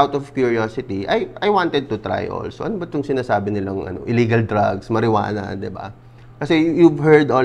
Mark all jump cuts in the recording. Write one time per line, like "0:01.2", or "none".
none